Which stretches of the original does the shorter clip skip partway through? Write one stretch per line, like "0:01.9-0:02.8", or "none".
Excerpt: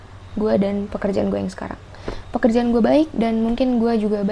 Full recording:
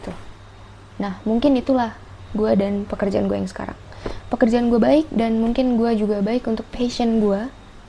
none